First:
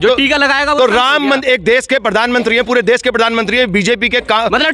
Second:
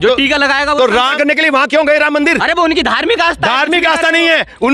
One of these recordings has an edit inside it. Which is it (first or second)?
second